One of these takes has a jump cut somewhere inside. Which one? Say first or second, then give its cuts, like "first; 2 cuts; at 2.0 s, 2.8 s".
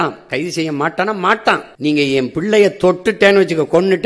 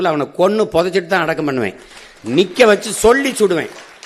first; 1 cut; at 1.7 s